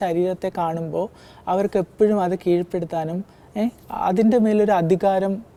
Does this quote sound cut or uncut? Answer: uncut